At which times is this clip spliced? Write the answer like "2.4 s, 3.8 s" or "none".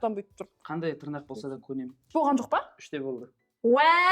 2.1 s